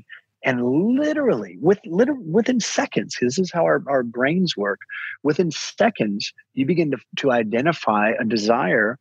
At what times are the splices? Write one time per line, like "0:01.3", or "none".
none